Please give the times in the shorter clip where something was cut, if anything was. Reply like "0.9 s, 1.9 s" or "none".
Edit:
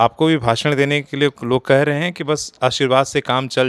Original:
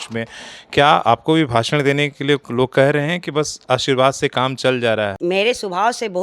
none